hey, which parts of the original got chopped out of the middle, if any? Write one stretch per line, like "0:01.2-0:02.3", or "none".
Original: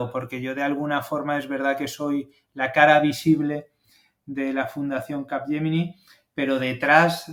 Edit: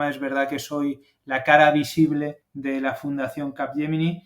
0:03.7-0:04.2